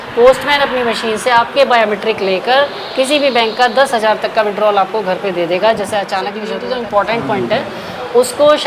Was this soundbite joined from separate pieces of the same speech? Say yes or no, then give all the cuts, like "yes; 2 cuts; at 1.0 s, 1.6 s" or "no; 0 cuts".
yes; 1 cut; at 6.5 s